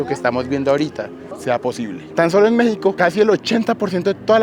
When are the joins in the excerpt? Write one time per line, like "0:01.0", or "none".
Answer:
0:02.1
0:03.0